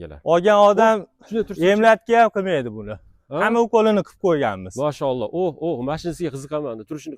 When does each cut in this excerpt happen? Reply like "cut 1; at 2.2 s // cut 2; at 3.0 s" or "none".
none

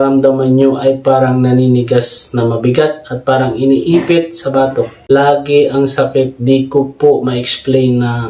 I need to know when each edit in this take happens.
none

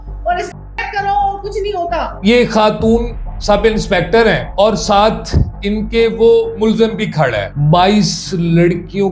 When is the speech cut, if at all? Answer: cut 1; at 2.2 s // cut 2; at 7.5 s

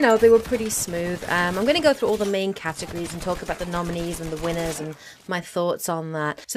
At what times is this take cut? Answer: cut 1; at 4.0 s

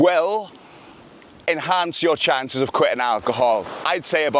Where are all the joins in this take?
none

